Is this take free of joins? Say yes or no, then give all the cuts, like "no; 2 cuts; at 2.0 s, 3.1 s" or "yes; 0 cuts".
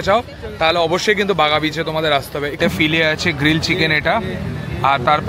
no; 1 cut; at 2.6 s